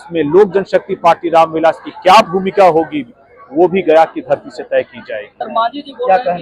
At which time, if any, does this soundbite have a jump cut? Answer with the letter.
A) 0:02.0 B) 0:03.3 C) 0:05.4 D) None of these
C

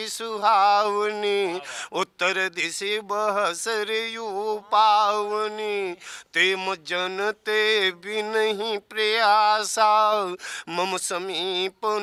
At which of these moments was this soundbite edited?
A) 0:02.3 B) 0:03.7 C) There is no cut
C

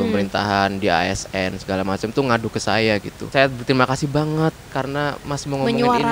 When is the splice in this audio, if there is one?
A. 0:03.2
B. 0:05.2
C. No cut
A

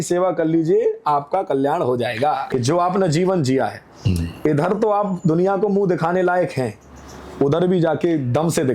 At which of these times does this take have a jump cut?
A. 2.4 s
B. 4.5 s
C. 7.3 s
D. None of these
A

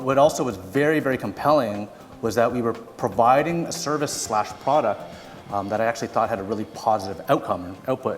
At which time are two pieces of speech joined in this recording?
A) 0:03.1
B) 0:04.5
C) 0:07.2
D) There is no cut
C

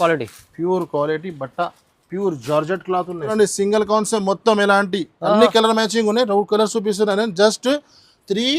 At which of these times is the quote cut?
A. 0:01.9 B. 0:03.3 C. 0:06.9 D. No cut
B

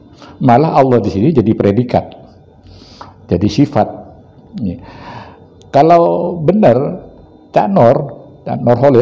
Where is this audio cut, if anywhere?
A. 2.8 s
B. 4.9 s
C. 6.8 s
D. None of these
D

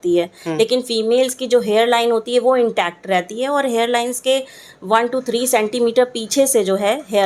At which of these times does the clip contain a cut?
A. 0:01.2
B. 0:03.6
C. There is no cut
C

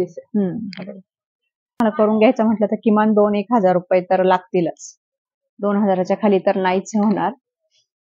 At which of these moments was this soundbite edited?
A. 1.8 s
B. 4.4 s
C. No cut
A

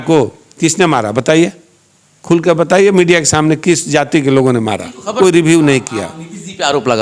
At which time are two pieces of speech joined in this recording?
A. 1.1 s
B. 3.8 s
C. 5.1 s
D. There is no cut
C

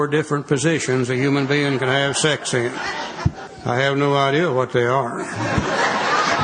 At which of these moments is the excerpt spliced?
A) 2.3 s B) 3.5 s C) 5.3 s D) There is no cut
B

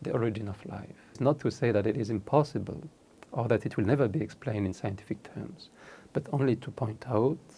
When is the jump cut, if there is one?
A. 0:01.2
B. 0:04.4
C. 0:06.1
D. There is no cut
A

